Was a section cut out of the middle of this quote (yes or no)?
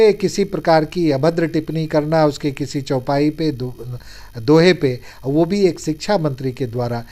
no